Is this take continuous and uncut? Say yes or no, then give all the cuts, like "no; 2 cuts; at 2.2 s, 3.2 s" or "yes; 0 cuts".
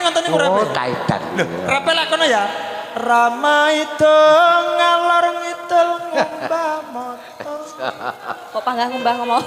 yes; 0 cuts